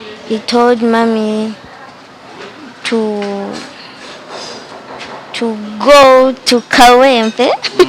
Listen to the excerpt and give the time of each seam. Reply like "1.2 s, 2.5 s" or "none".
none